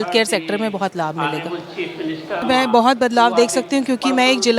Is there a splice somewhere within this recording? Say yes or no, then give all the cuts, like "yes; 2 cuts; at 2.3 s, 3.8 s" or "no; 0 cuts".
yes; 1 cut; at 2.4 s